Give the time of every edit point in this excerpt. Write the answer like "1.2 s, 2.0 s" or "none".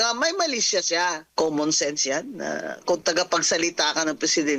1.2 s